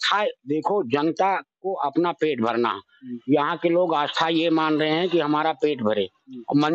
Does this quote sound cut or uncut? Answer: uncut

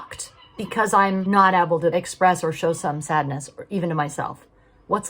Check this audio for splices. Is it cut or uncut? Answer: cut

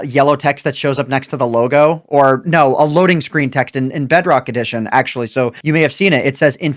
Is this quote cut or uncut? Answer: uncut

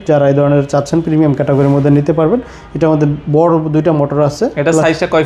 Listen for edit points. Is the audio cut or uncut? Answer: uncut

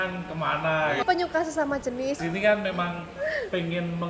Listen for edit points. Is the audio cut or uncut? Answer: cut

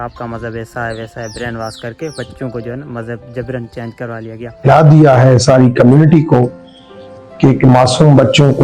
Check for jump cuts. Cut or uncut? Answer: cut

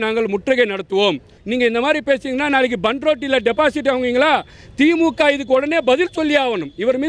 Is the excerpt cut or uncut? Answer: cut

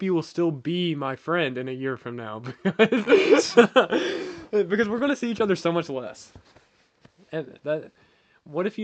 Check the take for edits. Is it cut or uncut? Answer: uncut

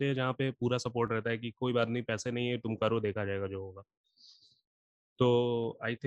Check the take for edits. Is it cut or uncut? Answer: uncut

